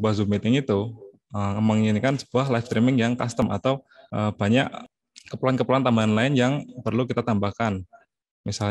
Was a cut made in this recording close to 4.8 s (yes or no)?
yes